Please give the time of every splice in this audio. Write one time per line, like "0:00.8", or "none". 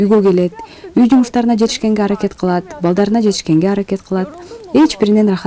none